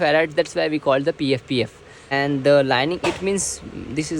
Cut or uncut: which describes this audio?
cut